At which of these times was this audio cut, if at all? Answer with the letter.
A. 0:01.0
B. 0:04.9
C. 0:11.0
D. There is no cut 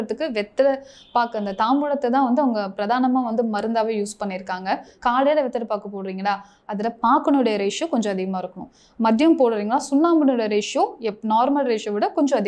B